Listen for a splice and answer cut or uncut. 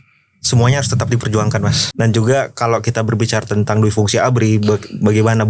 cut